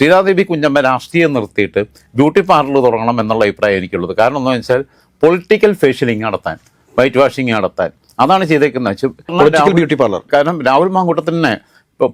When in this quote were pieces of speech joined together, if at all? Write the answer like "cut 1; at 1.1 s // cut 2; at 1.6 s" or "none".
none